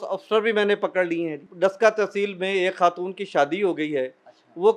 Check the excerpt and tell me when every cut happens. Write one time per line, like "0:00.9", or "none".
0:01.4